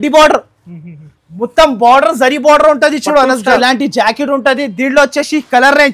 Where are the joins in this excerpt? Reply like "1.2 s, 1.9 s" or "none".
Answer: 3.6 s